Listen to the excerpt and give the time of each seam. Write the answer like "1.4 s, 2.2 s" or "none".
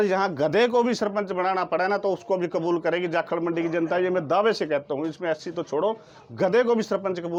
none